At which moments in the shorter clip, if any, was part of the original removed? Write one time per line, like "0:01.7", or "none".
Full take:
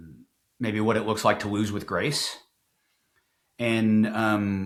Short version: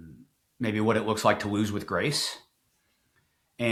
none